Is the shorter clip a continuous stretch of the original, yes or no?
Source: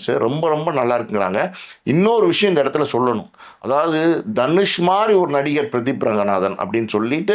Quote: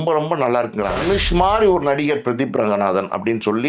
no